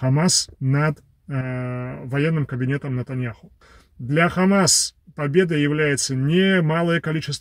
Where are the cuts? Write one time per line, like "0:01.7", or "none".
0:03.5